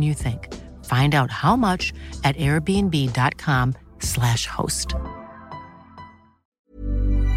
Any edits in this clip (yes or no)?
yes